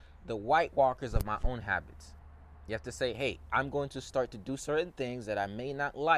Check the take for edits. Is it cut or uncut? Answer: uncut